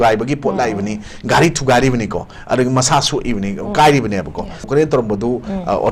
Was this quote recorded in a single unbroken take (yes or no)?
no